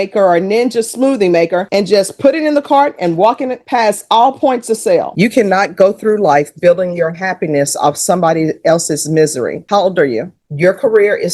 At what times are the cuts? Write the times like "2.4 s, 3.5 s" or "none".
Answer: 5.1 s, 10.4 s